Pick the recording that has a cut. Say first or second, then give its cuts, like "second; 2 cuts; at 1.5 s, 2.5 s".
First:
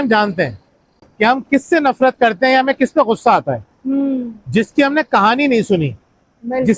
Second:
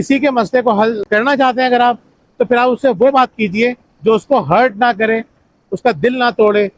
second; 1 cut; at 1.0 s